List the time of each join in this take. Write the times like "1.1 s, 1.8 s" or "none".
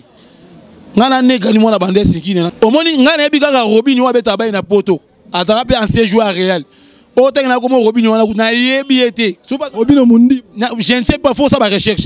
2.5 s